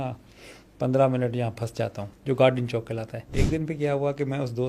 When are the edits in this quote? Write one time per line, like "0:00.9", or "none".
0:02.1
0:03.3